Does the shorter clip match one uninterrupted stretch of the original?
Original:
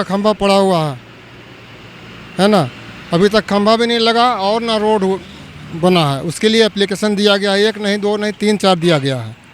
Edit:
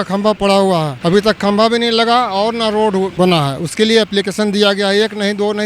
no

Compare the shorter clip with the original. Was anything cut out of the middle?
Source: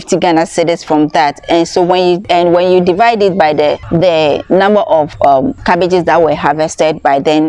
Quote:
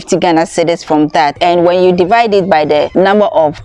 yes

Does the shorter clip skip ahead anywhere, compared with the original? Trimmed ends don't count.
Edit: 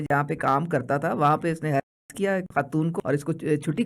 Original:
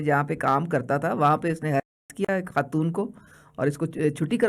yes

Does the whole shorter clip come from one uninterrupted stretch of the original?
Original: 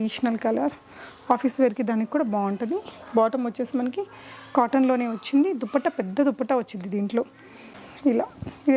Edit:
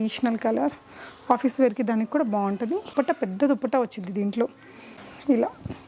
no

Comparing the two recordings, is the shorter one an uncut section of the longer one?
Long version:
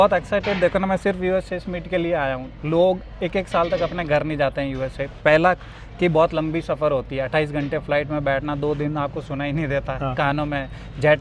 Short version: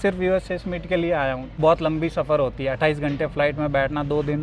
no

